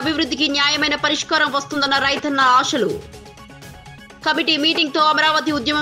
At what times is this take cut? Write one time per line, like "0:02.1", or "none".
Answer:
none